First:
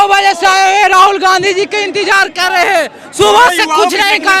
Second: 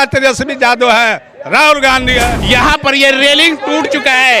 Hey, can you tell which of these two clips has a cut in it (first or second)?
second